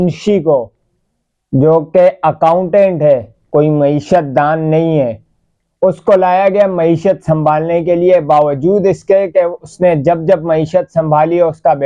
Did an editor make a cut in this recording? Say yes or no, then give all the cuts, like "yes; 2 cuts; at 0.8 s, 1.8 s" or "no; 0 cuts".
no; 0 cuts